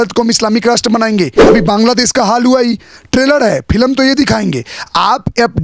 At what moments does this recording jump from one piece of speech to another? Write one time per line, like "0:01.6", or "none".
0:01.4